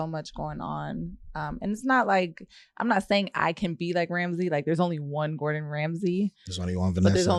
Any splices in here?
no; 0 cuts

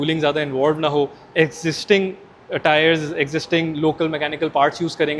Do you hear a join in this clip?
no; 0 cuts

